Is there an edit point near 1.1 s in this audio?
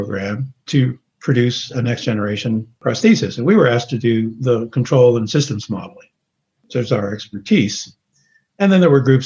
yes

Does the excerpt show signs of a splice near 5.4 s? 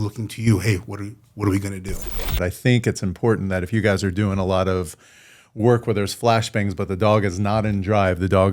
no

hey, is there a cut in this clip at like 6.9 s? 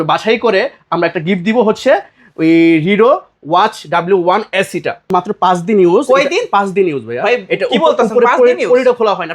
no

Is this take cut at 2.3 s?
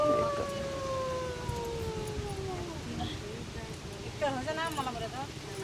no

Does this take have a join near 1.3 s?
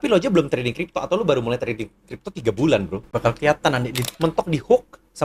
no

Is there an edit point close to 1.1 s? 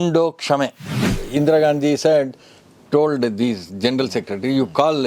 yes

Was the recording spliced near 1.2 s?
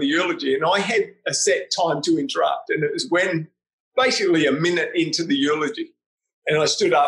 no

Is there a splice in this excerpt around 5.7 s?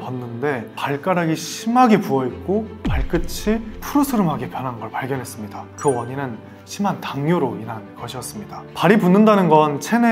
yes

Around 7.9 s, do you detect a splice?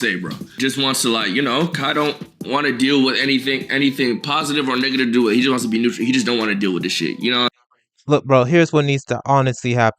yes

